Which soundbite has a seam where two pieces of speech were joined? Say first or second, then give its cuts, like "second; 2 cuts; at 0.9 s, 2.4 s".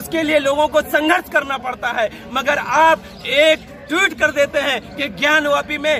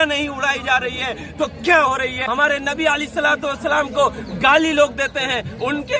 second; 1 cut; at 2.2 s